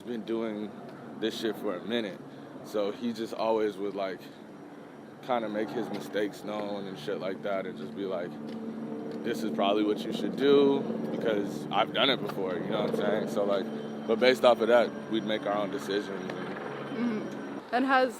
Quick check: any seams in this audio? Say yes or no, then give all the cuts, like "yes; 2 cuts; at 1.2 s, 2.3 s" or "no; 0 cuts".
no; 0 cuts